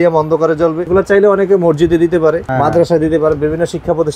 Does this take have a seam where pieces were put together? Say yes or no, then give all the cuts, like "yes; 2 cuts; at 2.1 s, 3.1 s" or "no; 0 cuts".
yes; 2 cuts; at 0.8 s, 2.5 s